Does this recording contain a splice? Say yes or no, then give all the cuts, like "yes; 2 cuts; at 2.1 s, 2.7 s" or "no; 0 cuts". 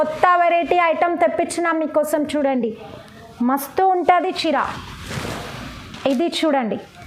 no; 0 cuts